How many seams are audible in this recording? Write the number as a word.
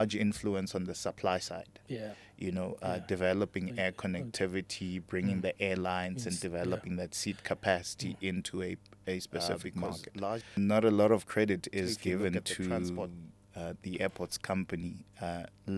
one